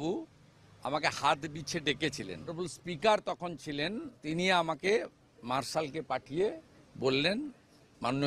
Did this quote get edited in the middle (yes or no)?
yes